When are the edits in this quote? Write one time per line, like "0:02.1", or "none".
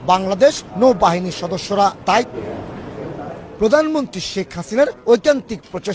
0:02.3